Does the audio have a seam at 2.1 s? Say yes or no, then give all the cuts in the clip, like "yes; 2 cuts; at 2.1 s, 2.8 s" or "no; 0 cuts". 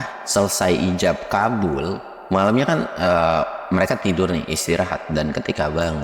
yes; 1 cut; at 2.1 s